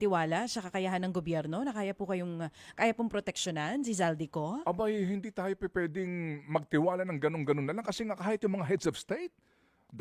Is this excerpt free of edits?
yes; 0 cuts

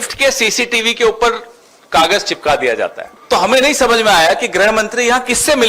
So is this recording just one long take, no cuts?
no; 1 cut; at 3.1 s

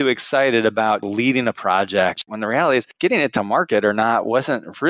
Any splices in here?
yes; 2 cuts; at 1.0 s, 2.5 s

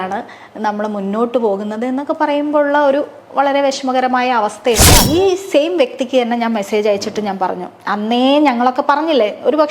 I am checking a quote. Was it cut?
yes; 1 cut; at 5.0 s

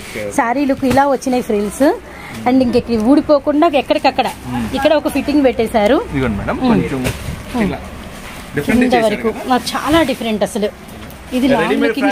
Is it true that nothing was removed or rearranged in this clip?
yes; 0 cuts

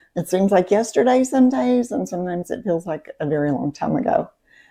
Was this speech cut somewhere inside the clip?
no; 0 cuts

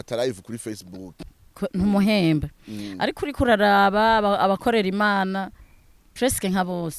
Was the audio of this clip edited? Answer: yes; 1 cut; at 1.2 s

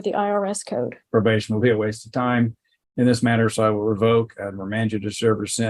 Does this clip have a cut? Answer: yes; 1 cut; at 1.0 s

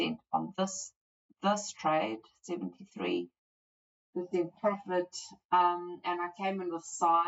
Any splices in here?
no; 0 cuts

